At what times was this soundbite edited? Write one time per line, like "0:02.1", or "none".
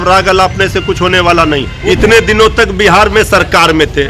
0:01.7